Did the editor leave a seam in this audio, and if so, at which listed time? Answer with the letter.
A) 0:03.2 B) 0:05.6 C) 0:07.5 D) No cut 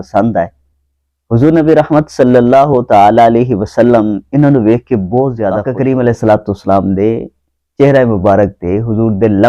B